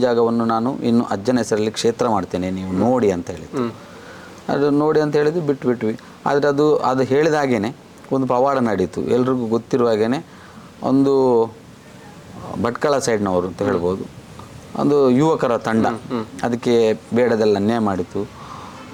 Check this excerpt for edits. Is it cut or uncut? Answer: uncut